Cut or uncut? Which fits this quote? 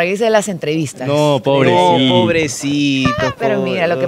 uncut